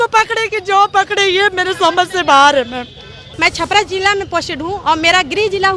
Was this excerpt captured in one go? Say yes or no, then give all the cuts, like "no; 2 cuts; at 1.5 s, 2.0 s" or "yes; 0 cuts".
no; 1 cut; at 3.2 s